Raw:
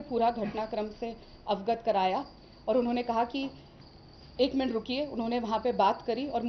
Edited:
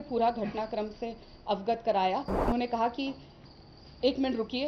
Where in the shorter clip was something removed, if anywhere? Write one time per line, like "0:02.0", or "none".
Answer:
0:02.5